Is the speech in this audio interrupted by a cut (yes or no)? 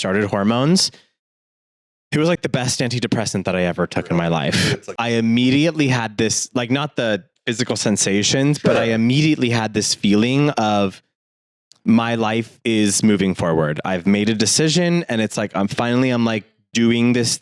yes